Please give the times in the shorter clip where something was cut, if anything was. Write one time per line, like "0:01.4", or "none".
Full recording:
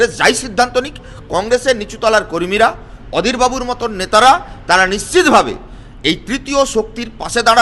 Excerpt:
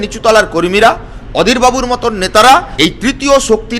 0:02.7